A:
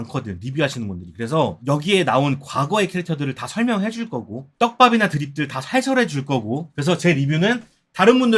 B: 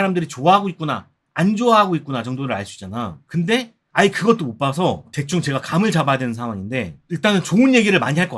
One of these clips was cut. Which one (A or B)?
A